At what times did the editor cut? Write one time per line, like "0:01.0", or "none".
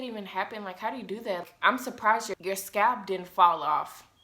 0:01.4
0:02.3